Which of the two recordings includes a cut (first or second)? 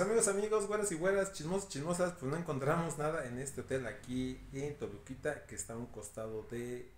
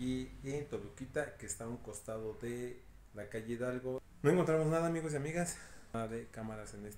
second